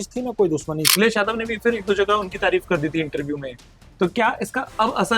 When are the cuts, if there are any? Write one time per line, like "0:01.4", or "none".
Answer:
0:00.9